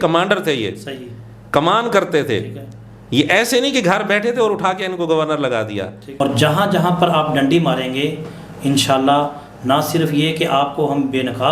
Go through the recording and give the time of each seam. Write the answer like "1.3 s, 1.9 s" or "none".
6.2 s